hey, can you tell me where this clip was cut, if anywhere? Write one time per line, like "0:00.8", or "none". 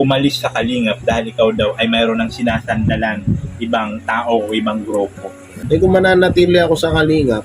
0:05.6